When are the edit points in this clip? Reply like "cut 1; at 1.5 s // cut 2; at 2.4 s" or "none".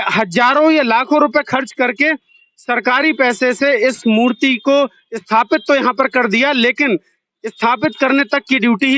none